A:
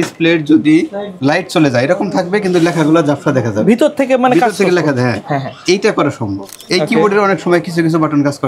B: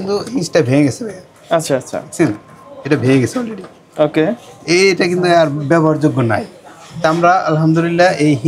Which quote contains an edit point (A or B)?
A